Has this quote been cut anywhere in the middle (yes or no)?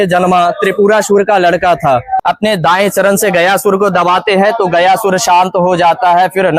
yes